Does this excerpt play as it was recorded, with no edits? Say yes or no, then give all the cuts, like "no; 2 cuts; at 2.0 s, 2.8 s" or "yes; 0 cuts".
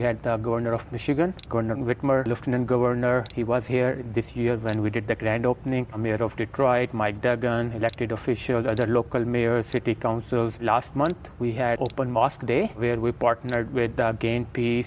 no; 3 cuts; at 2.2 s, 10.6 s, 11.8 s